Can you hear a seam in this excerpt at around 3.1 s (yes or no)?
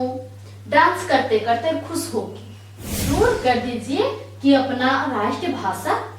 yes